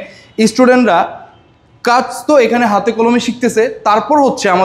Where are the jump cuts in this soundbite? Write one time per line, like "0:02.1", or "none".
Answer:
none